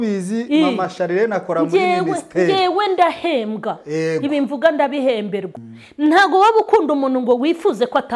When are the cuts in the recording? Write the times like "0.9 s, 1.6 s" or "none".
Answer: 5.5 s